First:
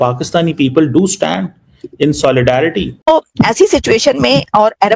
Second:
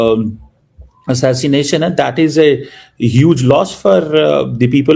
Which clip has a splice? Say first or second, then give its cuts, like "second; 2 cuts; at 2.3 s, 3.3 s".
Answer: first; 1 cut; at 3.1 s